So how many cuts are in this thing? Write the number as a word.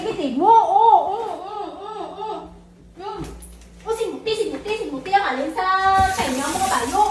zero